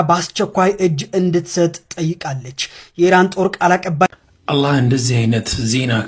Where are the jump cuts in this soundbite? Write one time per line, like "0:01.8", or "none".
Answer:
0:04.1